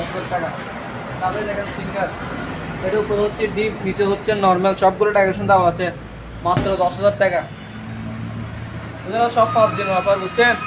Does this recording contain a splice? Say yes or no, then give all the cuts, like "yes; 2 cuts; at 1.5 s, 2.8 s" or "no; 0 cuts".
no; 0 cuts